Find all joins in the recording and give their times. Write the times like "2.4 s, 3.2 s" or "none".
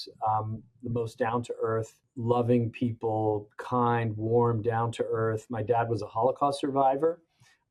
none